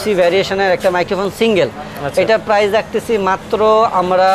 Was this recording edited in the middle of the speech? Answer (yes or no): no